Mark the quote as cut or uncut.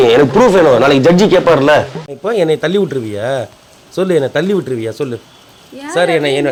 uncut